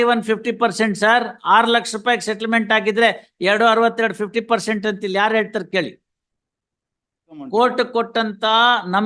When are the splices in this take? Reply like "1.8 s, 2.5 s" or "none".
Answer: 7.4 s